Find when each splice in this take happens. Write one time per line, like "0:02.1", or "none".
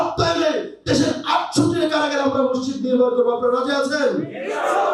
none